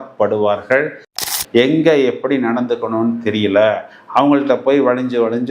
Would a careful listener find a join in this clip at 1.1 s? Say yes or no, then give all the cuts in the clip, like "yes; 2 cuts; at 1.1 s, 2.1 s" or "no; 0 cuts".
yes; 1 cut; at 1.1 s